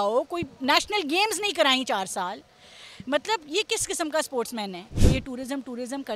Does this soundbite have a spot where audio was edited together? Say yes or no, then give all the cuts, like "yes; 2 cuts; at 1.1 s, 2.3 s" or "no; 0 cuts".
yes; 1 cut; at 4.9 s